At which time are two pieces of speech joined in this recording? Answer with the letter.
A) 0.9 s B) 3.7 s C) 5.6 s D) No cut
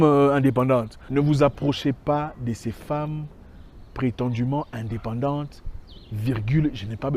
A